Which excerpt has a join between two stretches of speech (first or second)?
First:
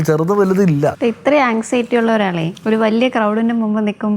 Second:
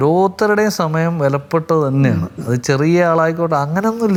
first